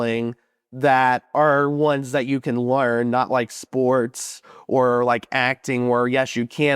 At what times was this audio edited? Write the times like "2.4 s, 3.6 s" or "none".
1.2 s